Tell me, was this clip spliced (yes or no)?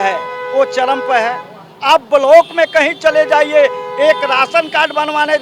no